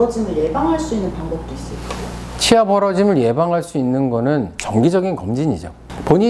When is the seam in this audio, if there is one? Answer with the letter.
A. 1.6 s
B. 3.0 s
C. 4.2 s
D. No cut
D